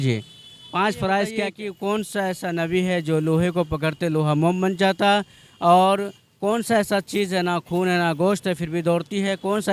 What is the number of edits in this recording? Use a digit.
1